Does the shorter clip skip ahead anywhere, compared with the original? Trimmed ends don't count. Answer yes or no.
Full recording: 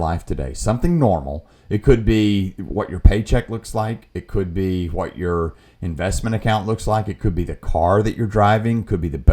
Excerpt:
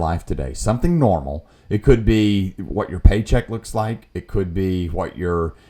no